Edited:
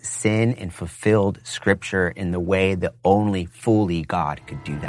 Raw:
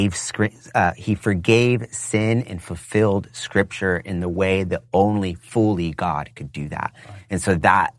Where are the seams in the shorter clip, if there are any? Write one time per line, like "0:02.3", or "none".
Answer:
none